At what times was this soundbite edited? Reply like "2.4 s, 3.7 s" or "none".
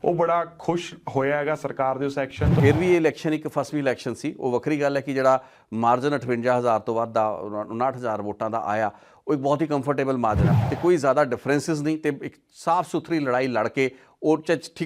2.5 s, 10.5 s